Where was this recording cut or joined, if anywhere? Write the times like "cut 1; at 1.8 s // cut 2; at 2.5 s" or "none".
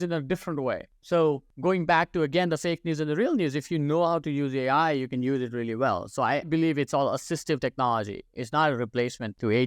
cut 1; at 0.9 s // cut 2; at 1.5 s // cut 3; at 6.5 s